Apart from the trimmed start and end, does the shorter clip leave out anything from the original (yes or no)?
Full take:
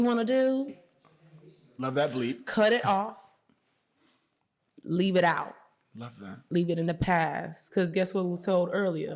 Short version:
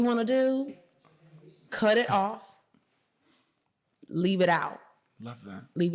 yes